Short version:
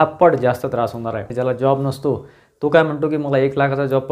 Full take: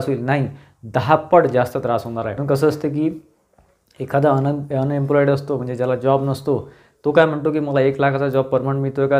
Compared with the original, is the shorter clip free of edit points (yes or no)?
no